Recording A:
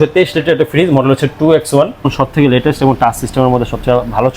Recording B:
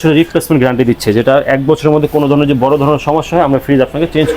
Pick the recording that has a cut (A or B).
A